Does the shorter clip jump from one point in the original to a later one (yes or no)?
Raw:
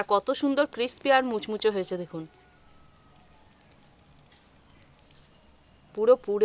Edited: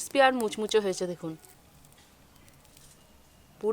yes